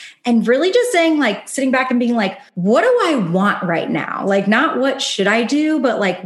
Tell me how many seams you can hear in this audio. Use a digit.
1